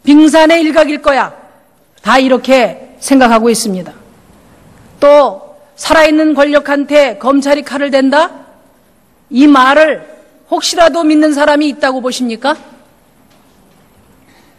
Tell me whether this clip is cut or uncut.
uncut